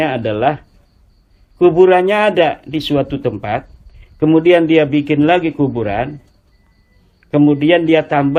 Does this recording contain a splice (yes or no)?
no